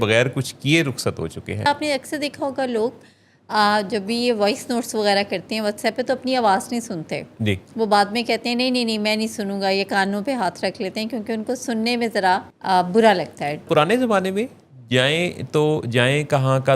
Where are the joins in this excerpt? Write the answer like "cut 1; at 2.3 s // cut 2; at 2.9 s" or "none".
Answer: cut 1; at 1.7 s // cut 2; at 13.7 s

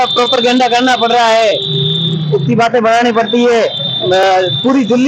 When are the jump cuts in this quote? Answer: none

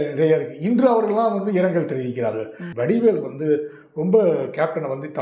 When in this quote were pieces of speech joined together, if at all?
cut 1; at 2.7 s

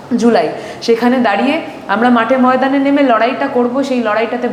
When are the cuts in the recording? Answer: none

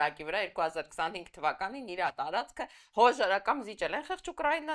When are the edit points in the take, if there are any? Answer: none

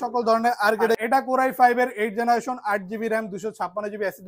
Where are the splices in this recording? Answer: cut 1; at 1.0 s

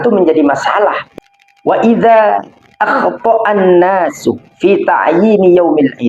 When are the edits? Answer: cut 1; at 1.0 s

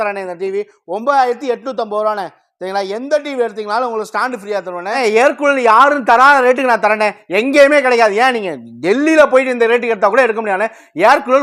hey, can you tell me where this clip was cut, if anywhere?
cut 1; at 5.0 s

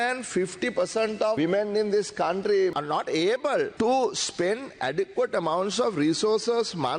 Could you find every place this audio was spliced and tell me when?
cut 1; at 1.4 s // cut 2; at 2.7 s // cut 3; at 3.7 s

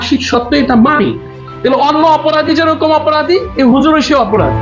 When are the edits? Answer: cut 1; at 1.3 s

